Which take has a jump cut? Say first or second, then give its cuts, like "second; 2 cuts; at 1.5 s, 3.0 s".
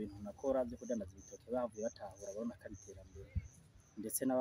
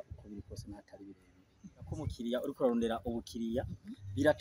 second; 1 cut; at 2.1 s